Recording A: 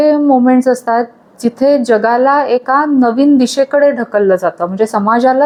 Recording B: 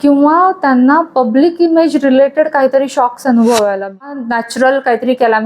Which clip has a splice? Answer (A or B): B